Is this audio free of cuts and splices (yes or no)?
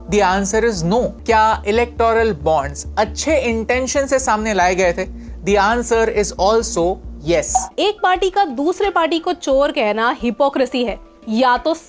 no